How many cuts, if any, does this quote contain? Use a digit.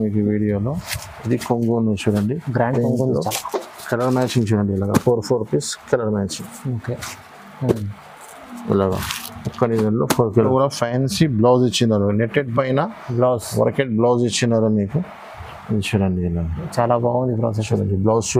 1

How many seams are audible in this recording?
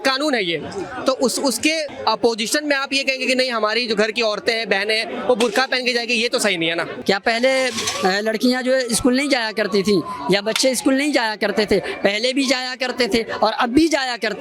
2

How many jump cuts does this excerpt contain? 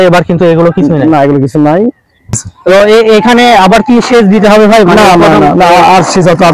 1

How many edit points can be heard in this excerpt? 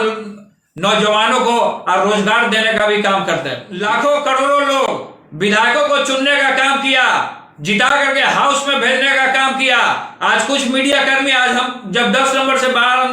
1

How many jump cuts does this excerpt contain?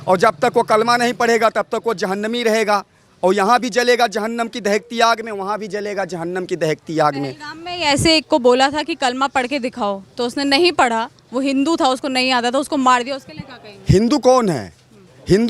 0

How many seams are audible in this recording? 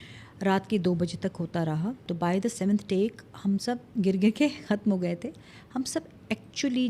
2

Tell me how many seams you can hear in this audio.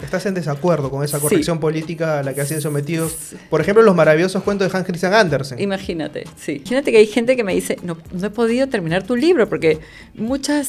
1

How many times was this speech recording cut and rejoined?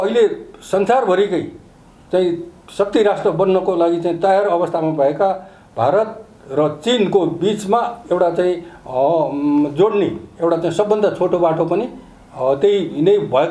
0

